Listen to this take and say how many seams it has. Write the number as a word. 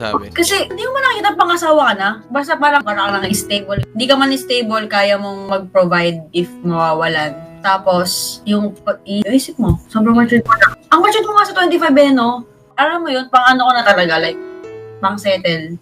one